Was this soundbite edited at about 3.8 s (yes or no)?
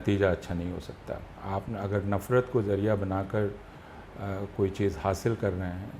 no